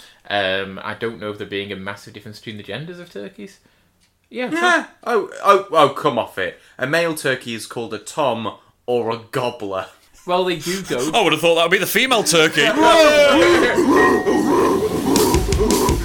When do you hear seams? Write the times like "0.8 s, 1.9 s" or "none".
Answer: 10.0 s